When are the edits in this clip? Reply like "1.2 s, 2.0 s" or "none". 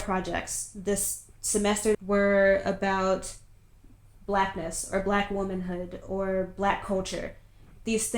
1.9 s